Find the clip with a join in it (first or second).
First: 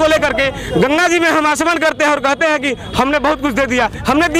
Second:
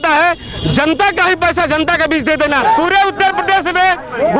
second